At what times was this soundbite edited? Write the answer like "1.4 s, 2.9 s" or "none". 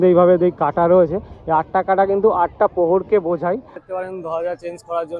3.8 s

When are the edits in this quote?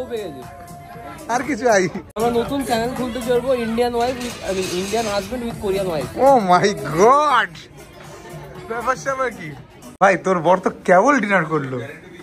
2.2 s, 10.0 s

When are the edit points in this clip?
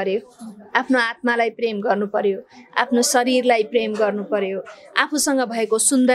none

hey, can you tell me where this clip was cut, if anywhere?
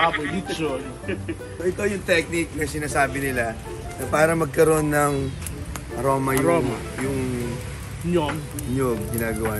1.5 s

